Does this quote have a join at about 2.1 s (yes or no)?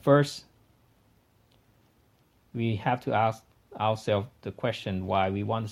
no